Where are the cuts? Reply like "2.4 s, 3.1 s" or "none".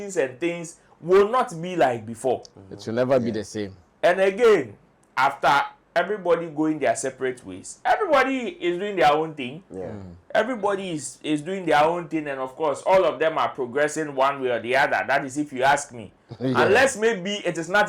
none